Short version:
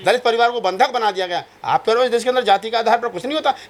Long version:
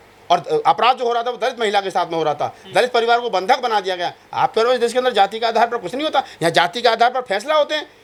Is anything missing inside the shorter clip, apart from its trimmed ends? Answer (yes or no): no